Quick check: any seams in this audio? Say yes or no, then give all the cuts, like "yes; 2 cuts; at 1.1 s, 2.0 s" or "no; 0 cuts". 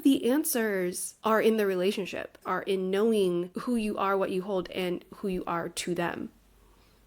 yes; 3 cuts; at 1.1 s, 2.5 s, 3.5 s